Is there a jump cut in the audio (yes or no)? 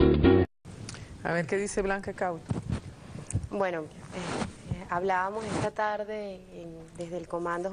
no